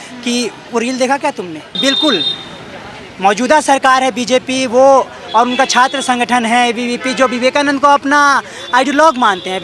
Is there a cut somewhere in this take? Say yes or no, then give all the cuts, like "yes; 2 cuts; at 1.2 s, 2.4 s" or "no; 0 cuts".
yes; 1 cut; at 1.8 s